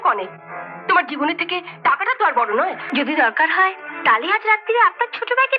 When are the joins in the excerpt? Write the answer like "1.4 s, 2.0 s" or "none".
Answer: 2.8 s